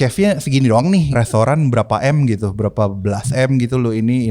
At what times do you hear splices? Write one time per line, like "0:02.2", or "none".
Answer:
0:01.1